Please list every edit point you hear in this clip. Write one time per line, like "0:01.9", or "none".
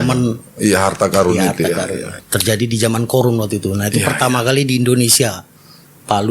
0:02.1